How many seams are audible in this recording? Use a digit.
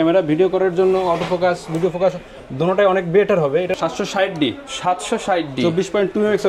1